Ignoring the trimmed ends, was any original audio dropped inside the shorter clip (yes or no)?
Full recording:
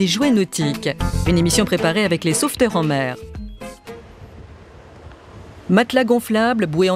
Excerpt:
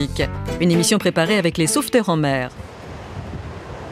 yes